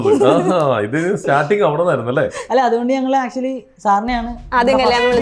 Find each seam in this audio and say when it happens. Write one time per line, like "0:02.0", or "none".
none

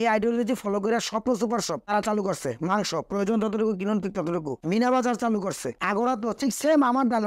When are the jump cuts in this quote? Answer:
none

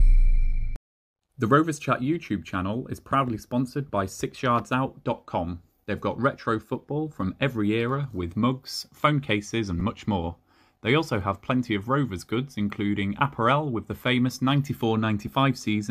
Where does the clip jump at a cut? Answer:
0:01.4

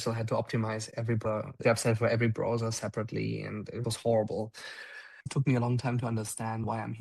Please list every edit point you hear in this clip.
0:01.1
0:05.2

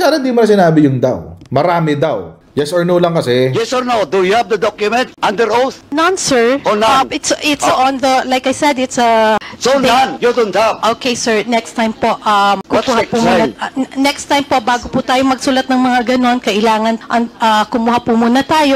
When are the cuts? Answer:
0:02.4

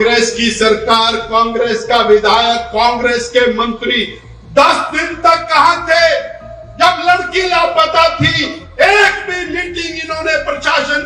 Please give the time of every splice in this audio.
none

